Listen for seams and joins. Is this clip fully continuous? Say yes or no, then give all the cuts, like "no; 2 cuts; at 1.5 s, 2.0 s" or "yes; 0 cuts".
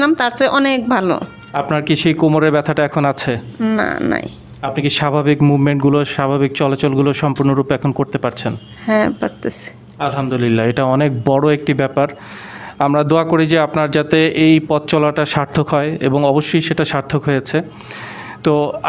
yes; 0 cuts